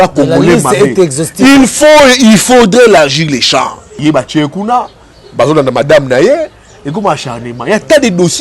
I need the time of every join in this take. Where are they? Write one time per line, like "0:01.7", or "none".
0:03.8